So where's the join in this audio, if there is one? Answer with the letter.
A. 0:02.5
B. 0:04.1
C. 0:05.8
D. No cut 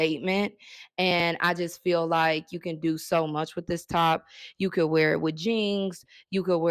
D